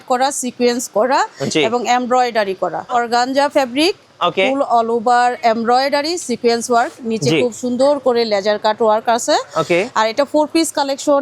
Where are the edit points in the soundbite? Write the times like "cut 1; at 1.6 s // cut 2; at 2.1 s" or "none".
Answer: cut 1; at 2.9 s